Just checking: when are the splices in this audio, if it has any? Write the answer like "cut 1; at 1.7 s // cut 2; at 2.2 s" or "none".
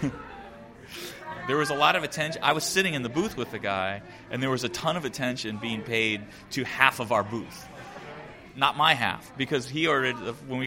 cut 1; at 1.3 s